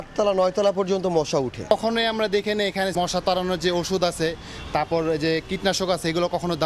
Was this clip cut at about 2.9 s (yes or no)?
yes